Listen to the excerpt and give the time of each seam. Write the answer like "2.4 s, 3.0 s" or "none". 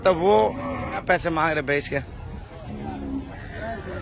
1.0 s